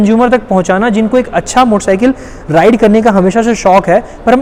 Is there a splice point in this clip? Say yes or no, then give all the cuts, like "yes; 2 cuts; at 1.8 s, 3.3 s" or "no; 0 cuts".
no; 0 cuts